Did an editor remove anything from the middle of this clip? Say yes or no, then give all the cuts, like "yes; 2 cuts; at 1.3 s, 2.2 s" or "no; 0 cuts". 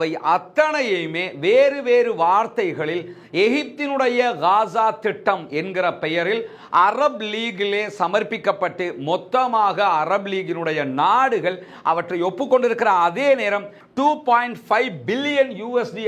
yes; 1 cut; at 13.8 s